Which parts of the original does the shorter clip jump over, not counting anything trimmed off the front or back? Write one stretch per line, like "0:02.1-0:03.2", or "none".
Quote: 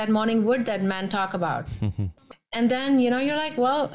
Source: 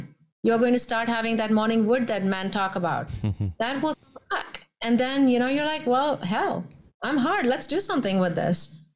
0:03.5-0:04.4